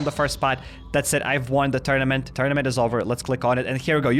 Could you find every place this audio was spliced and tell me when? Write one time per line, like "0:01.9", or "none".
0:02.3